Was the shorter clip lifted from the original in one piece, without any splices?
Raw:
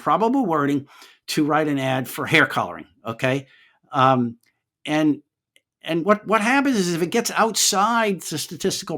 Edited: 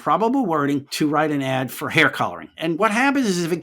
no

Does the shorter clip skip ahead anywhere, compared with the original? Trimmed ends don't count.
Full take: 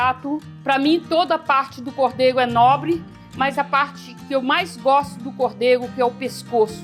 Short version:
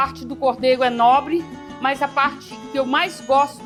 no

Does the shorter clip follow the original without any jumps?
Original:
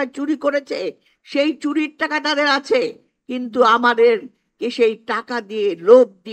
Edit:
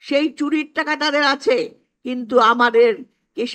yes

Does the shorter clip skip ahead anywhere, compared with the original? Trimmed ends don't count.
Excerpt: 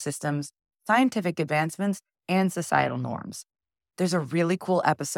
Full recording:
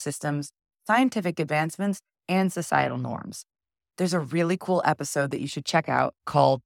no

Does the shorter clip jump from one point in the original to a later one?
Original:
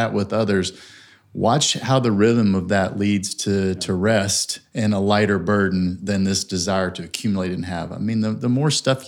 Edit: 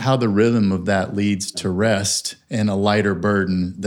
yes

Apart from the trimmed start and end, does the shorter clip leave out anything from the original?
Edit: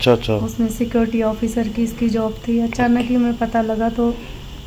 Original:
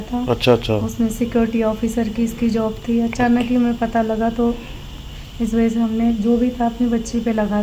no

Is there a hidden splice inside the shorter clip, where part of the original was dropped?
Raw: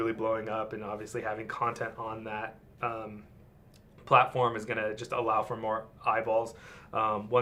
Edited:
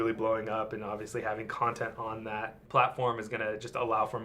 yes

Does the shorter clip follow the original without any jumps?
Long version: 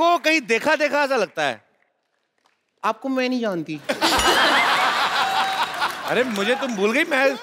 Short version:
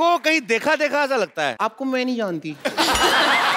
no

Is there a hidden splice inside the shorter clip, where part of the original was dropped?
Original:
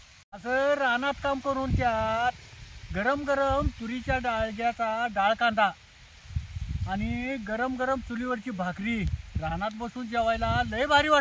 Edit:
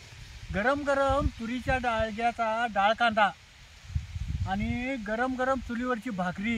no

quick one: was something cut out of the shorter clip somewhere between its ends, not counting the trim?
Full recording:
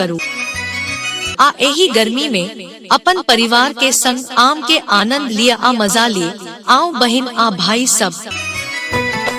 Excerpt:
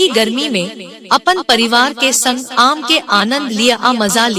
no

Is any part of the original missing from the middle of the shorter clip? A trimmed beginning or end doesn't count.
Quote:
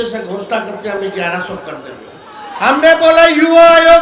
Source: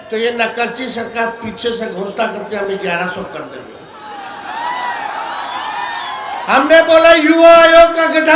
yes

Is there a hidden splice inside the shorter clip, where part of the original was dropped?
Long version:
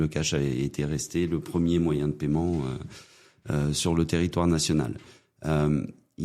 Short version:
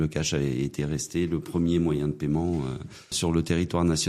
yes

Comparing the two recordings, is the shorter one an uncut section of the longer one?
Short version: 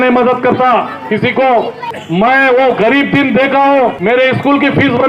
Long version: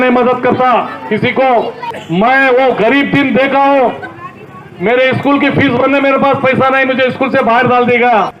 no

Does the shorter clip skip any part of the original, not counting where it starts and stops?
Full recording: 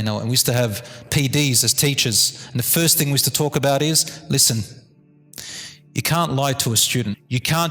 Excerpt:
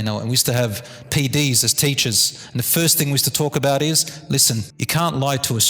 yes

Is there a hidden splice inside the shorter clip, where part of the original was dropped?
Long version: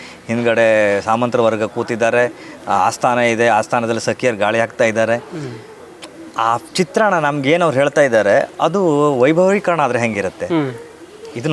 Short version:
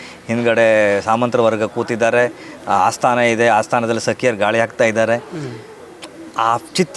no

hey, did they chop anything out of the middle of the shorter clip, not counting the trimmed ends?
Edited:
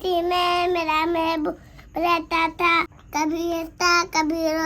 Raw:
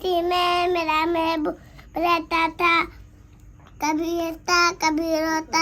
yes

